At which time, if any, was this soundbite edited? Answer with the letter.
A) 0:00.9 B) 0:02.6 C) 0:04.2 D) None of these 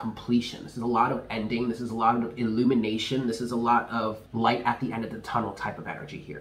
C